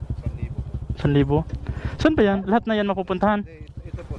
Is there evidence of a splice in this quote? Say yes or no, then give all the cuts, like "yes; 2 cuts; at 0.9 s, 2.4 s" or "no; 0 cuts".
no; 0 cuts